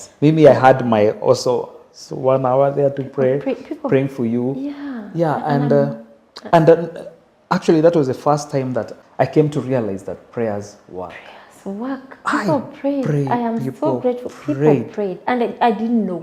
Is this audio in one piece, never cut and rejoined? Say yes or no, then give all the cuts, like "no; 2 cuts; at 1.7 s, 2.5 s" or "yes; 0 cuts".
no; 1 cut; at 9.0 s